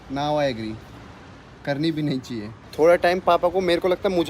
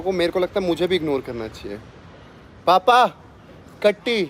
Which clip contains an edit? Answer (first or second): first